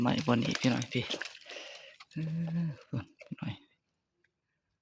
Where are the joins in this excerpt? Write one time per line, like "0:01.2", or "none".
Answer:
none